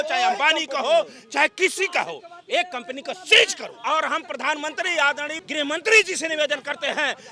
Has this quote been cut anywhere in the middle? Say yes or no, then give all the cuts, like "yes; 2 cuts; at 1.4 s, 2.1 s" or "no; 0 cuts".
yes; 2 cuts; at 3.7 s, 5.4 s